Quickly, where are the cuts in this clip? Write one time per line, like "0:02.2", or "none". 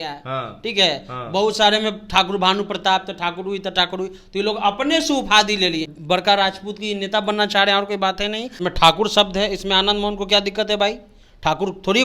0:05.9
0:08.6